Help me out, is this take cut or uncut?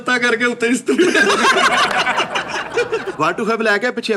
cut